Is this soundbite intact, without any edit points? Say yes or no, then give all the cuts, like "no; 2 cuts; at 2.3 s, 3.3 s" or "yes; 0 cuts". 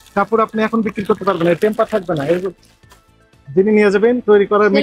yes; 0 cuts